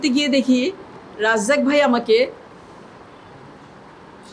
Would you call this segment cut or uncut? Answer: uncut